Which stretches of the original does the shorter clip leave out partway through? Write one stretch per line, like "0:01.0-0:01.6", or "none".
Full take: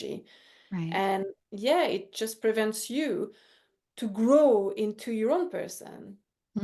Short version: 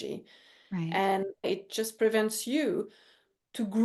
0:01.5-0:01.9